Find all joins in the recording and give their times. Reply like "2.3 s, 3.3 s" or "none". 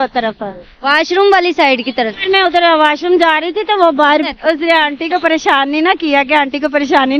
4.3 s

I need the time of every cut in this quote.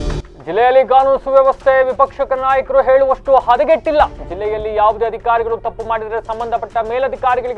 none

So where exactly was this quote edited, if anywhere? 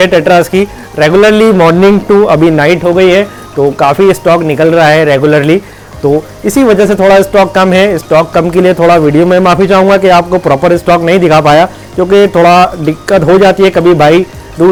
none

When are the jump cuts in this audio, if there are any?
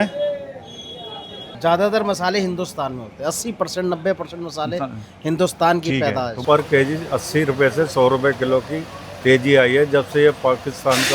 1.4 s, 6.4 s

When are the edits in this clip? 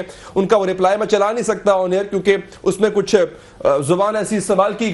none

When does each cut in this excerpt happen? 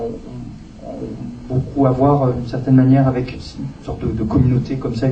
none

